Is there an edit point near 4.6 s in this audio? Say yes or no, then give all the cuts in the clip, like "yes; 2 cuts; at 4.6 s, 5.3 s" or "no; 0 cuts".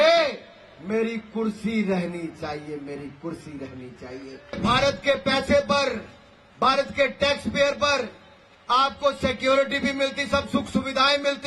yes; 1 cut; at 4.6 s